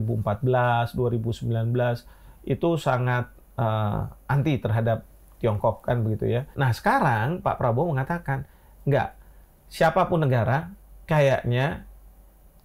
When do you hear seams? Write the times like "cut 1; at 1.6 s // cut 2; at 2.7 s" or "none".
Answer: cut 1; at 6.5 s